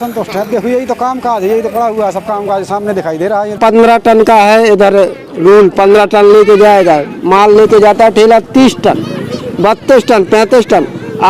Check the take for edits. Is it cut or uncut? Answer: cut